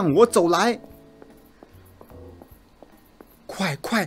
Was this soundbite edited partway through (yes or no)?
no